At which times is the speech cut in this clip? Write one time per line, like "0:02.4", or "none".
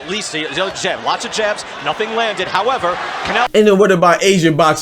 0:03.5